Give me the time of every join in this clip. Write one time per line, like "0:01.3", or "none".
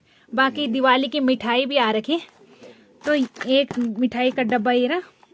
none